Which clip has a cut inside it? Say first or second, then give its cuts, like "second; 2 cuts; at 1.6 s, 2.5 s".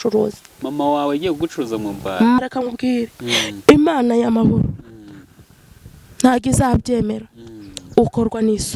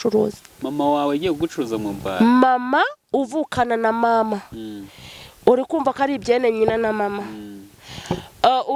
first; 1 cut; at 2.4 s